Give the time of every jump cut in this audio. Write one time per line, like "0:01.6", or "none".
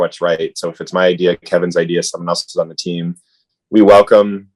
none